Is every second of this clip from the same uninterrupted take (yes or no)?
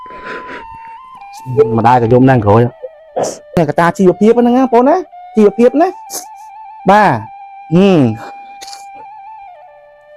no